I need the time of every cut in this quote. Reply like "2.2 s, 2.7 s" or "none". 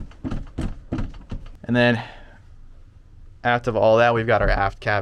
none